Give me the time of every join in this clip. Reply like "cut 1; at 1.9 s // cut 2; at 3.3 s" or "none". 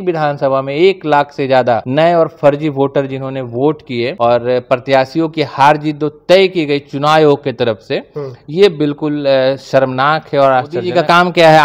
cut 1; at 1.9 s // cut 2; at 4.1 s // cut 3; at 10.9 s